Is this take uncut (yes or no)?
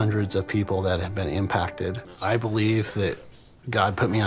no